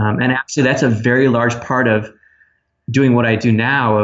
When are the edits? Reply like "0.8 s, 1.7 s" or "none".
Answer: none